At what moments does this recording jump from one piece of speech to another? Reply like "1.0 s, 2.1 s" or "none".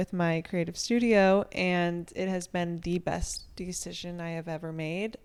none